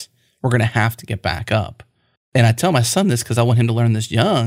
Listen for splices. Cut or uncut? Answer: cut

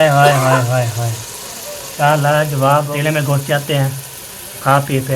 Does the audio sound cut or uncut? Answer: cut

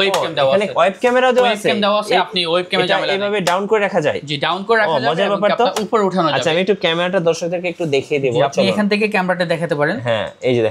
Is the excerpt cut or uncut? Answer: uncut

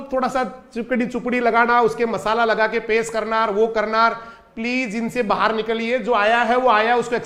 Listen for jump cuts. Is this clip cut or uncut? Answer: uncut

